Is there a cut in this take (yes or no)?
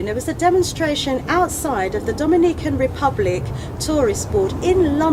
no